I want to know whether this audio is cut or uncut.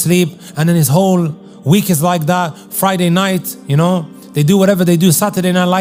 uncut